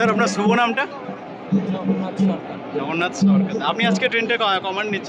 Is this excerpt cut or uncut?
uncut